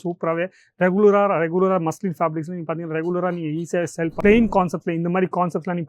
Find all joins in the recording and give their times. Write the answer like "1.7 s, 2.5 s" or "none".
4.1 s